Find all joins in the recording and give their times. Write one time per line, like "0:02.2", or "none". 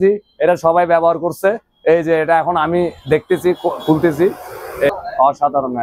0:04.9